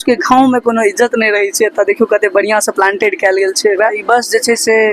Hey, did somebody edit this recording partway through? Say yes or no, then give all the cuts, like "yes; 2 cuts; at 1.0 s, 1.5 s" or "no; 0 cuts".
yes; 1 cut; at 4.0 s